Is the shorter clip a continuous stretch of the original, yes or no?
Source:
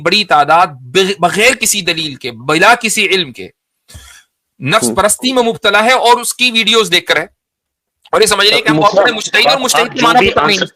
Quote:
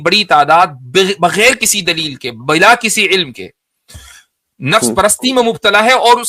yes